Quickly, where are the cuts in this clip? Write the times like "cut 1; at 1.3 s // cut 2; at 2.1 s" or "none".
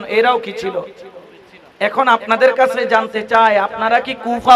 none